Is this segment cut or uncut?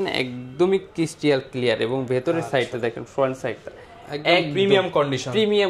uncut